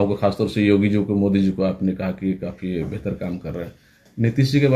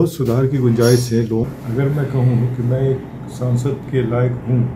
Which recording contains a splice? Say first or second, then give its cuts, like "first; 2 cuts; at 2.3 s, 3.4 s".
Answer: second; 1 cut; at 1.4 s